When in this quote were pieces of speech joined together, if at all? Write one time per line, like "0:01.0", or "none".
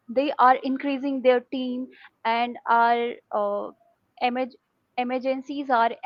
none